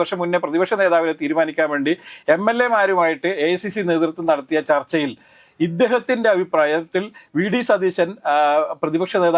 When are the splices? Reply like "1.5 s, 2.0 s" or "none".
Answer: none